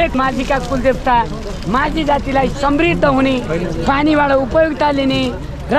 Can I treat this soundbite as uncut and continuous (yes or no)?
yes